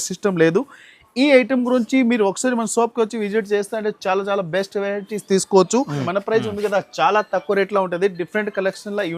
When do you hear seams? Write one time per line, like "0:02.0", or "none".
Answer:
0:06.0